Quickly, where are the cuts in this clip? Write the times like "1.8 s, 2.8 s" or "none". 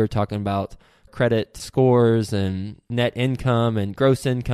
none